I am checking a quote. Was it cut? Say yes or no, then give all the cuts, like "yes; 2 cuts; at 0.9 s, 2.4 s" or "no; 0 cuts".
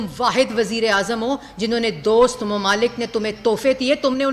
no; 0 cuts